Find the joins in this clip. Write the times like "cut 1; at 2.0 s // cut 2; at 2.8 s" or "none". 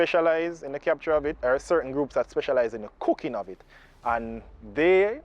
cut 1; at 1.4 s